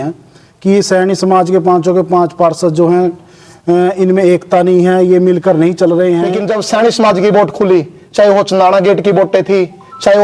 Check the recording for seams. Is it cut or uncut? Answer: cut